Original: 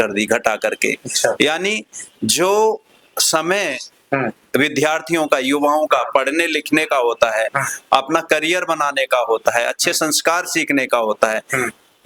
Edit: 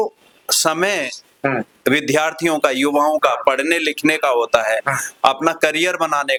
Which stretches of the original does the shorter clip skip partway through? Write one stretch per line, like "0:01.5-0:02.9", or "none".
none

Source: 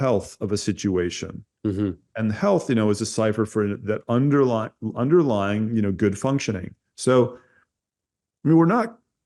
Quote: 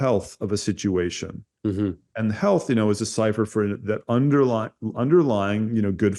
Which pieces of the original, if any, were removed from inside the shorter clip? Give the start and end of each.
none

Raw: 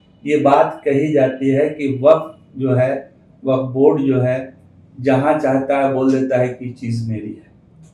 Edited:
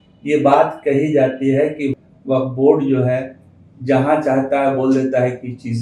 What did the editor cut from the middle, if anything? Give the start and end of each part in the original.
0:01.9-0:03.1

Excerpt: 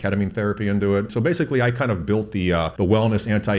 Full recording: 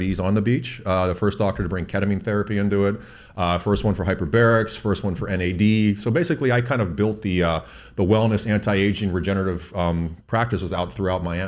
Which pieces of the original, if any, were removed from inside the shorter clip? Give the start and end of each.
0:03.0-0:06.0
0:07.6-0:07.9

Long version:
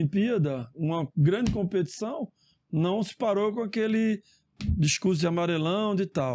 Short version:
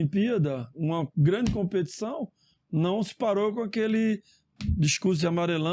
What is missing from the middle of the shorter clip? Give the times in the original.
none

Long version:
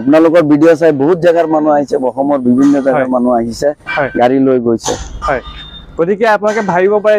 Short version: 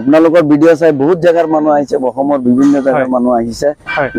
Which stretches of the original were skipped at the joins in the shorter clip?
none

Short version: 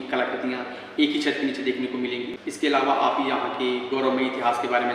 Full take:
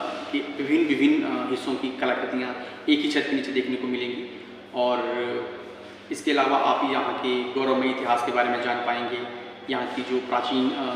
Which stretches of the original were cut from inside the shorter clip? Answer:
0:04.3-0:06.0

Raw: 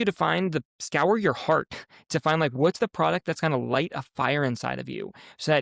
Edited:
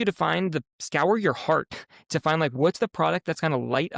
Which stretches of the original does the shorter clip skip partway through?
none

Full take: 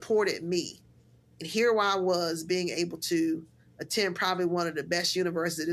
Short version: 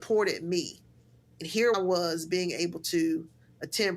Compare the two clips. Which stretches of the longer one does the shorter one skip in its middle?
0:01.7-0:01.9

